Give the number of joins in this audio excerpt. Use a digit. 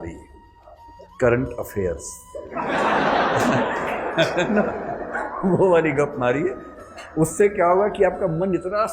1